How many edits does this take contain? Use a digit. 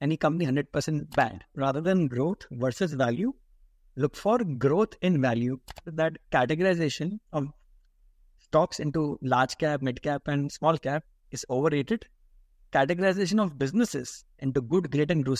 2